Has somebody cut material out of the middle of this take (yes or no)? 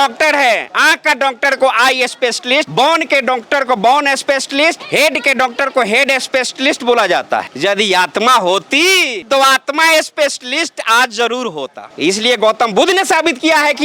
no